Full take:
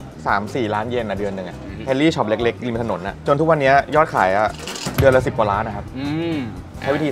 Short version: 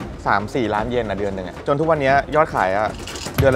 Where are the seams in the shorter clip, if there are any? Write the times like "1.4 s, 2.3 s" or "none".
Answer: 1.5 s